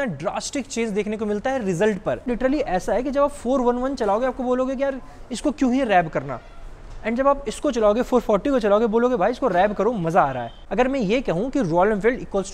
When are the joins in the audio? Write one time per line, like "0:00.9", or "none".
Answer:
0:02.3
0:10.6